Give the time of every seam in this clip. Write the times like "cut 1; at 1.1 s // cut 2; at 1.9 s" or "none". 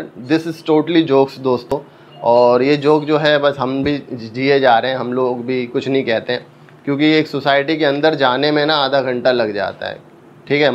none